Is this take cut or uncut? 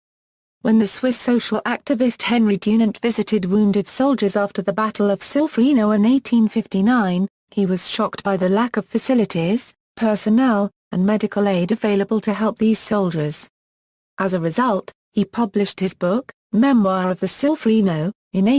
uncut